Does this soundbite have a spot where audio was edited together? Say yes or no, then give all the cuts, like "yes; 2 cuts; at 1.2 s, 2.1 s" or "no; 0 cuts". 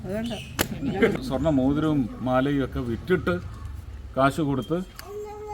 yes; 1 cut; at 1.1 s